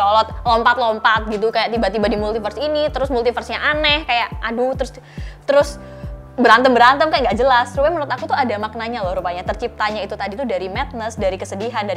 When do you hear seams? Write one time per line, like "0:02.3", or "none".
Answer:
none